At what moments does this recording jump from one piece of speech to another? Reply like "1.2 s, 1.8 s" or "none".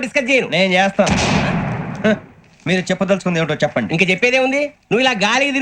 none